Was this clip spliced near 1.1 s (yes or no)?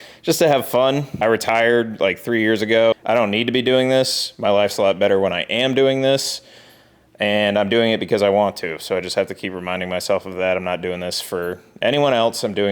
yes